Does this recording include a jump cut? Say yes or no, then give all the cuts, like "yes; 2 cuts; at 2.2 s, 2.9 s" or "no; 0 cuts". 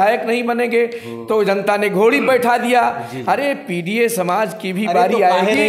no; 0 cuts